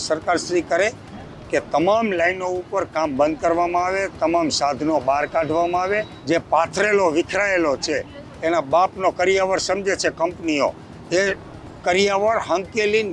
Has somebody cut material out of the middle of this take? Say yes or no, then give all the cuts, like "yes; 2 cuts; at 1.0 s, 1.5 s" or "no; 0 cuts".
yes; 1 cut; at 6.1 s